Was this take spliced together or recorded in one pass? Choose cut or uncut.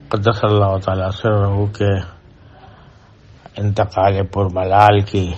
uncut